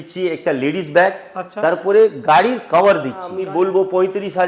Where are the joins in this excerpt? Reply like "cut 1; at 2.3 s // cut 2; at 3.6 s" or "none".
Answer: cut 1; at 3.4 s